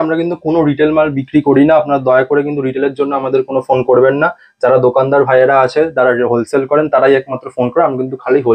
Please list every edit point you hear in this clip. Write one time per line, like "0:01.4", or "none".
none